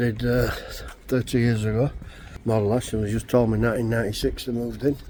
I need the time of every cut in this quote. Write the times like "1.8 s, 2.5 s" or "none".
none